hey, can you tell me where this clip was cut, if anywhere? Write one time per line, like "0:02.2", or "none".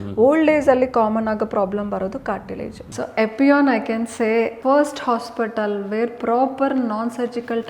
0:02.8
0:04.5